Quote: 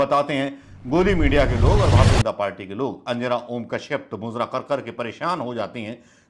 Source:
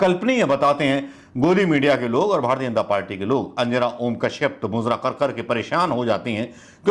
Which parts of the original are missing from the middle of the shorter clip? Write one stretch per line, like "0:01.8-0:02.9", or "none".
none